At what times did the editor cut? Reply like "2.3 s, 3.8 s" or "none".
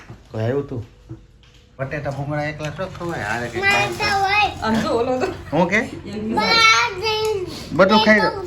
1.7 s